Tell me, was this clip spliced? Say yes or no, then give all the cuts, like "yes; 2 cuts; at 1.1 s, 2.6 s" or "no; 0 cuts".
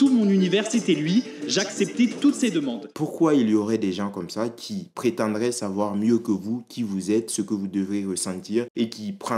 yes; 1 cut; at 3.0 s